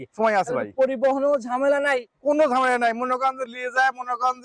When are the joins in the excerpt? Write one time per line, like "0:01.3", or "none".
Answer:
none